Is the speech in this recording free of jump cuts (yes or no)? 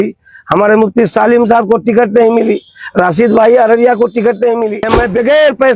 no